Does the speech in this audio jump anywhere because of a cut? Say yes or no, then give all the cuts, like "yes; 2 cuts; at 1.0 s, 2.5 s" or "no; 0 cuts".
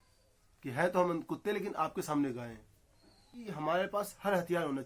yes; 1 cut; at 3.5 s